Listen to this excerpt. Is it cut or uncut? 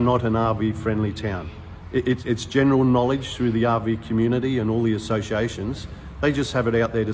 uncut